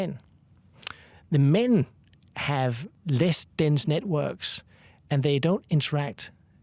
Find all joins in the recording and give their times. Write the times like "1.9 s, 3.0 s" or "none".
2.9 s